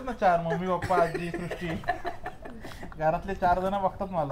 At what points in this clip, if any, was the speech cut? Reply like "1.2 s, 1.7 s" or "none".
none